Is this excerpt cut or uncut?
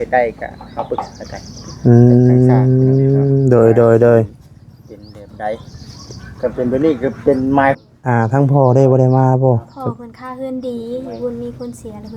cut